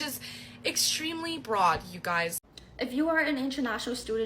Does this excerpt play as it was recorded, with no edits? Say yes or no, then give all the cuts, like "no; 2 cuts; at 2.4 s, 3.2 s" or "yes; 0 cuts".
no; 1 cut; at 2.4 s